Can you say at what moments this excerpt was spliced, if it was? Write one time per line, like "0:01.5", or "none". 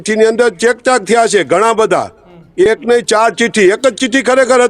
none